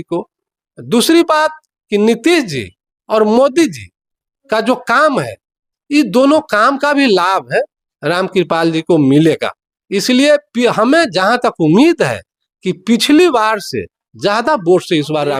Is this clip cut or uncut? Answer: uncut